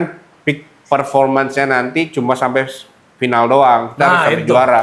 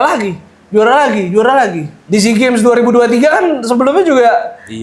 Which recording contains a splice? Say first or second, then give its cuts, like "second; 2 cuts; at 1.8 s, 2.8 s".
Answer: second; 1 cut; at 1.9 s